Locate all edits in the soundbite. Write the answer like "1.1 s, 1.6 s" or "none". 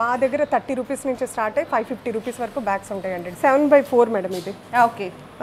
3.3 s